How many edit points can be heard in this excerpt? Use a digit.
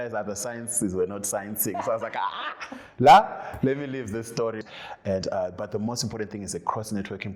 1